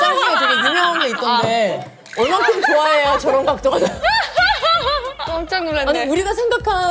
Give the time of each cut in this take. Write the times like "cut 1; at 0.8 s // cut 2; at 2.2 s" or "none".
none